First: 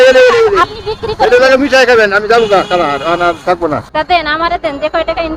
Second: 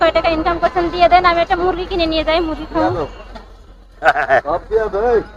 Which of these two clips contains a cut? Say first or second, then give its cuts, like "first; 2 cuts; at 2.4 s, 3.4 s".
first; 1 cut; at 3.9 s